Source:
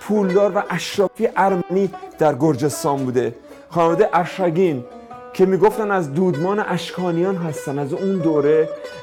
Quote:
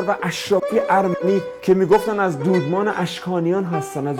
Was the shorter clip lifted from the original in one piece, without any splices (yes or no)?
no